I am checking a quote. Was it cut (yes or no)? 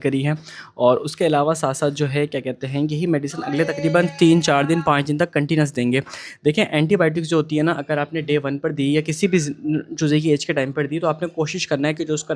no